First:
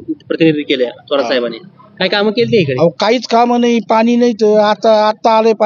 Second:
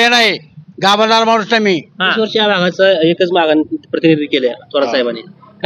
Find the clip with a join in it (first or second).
second